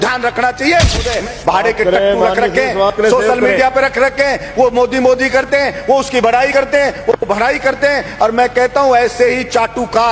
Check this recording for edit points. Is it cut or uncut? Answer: cut